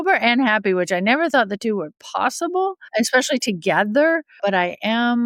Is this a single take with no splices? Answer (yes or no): no